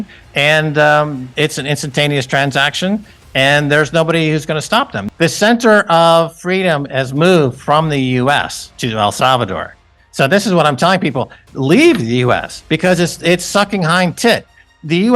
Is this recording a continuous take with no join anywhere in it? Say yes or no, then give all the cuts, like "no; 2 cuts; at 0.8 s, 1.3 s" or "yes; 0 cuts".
yes; 0 cuts